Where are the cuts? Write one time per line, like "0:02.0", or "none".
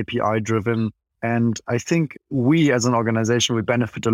0:01.1
0:02.2